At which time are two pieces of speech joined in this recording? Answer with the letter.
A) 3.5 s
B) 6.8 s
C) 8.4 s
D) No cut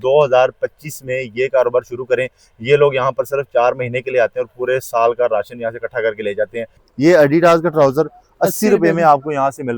B